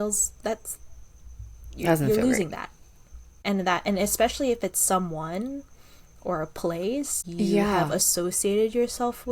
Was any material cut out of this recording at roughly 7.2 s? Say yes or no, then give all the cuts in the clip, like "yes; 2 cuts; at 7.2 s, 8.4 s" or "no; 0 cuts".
yes; 2 cuts; at 3.4 s, 7.2 s